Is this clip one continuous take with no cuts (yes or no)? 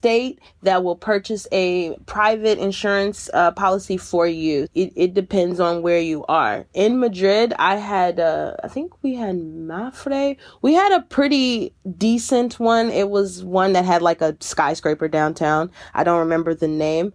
yes